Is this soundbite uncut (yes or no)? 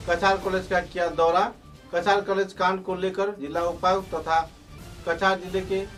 yes